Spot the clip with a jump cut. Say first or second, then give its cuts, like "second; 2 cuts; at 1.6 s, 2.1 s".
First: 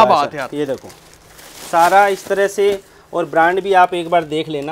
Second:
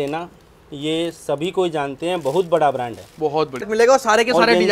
second; 1 cut; at 3.7 s